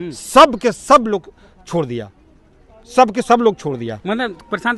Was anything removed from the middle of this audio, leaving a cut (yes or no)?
no